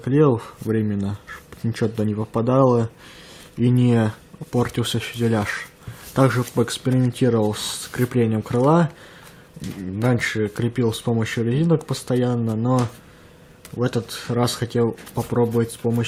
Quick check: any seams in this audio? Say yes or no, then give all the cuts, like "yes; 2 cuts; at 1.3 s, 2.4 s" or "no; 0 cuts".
no; 0 cuts